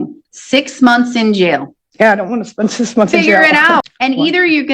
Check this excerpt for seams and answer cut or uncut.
cut